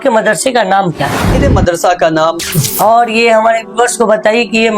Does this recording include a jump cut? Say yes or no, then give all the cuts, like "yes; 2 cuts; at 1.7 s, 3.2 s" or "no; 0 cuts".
yes; 2 cuts; at 1.4 s, 2.5 s